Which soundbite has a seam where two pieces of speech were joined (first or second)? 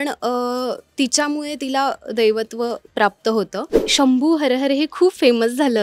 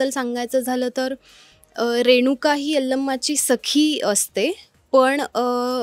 first